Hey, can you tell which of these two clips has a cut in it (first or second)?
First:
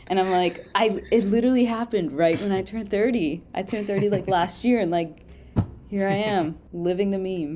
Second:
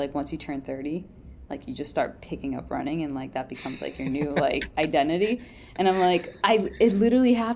first